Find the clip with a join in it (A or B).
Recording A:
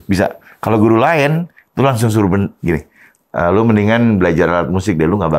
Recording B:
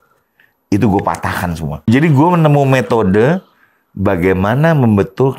B